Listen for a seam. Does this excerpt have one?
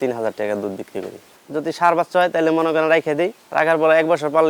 yes; 2 cuts; at 1.2 s, 3.4 s

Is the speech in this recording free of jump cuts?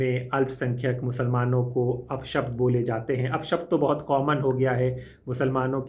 yes; 0 cuts

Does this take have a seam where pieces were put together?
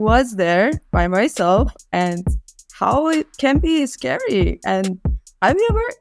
no; 0 cuts

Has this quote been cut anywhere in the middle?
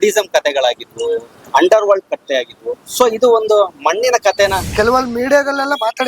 yes; 1 cut; at 4.6 s

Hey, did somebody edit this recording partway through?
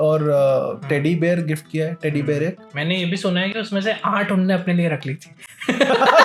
no; 0 cuts

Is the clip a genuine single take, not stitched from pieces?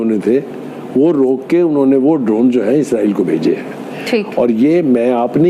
yes; 0 cuts

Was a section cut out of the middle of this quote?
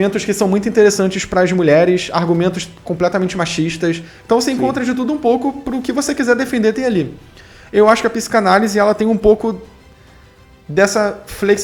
no; 0 cuts

